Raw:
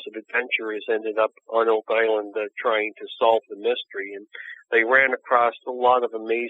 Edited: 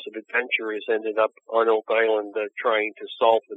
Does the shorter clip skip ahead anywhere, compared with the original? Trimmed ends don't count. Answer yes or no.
no